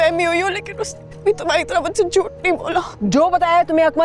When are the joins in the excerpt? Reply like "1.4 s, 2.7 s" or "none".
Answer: 2.9 s